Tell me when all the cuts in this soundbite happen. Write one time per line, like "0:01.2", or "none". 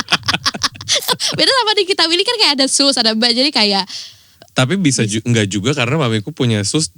0:01.0